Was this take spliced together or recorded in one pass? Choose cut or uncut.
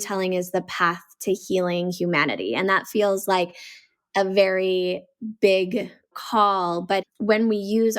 cut